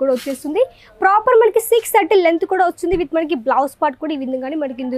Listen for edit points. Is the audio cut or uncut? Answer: uncut